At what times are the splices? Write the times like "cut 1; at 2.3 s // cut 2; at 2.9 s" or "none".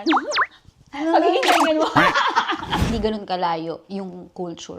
cut 1; at 2.9 s